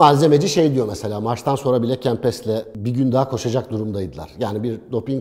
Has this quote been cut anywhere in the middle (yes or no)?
no